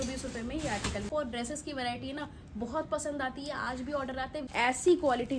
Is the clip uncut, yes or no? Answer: no